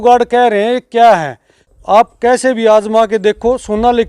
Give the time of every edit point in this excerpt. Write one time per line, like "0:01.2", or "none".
0:01.7